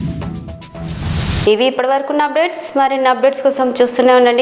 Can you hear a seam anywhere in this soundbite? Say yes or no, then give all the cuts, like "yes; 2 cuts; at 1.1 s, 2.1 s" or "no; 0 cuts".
no; 0 cuts